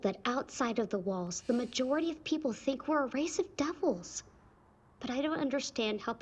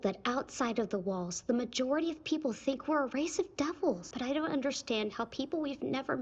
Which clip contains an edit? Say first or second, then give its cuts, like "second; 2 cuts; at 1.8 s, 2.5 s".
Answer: second; 1 cut; at 4.1 s